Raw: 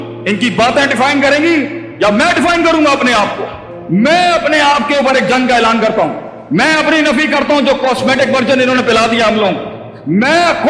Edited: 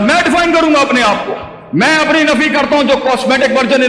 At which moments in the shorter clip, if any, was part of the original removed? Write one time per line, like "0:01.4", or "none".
0:01.5